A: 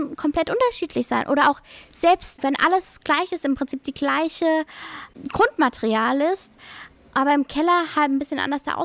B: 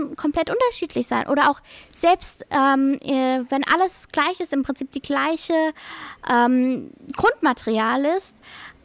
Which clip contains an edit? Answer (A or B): A